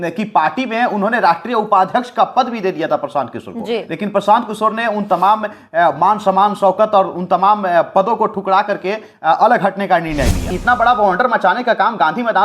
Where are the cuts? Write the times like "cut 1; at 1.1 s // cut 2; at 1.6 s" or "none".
cut 1; at 10.5 s